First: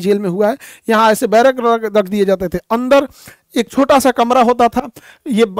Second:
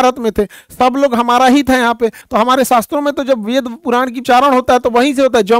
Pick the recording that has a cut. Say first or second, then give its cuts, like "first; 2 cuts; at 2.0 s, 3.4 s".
second; 2 cuts; at 2.2 s, 4.2 s